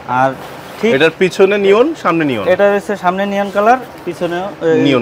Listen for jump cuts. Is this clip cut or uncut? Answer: uncut